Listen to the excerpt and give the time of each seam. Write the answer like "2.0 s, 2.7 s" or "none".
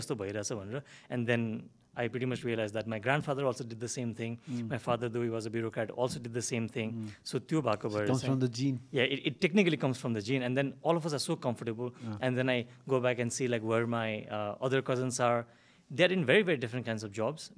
none